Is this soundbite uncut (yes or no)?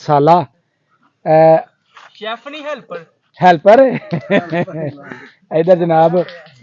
yes